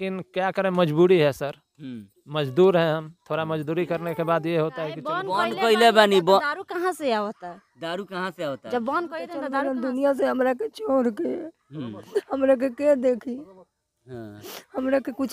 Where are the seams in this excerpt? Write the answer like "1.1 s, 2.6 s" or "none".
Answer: 5.2 s, 9.4 s